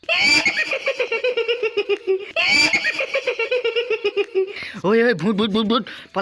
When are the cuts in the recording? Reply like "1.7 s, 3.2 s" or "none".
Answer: 2.4 s, 4.6 s